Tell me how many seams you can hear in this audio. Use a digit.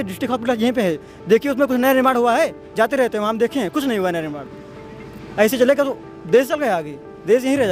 0